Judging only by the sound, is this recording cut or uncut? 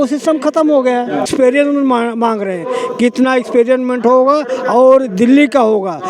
cut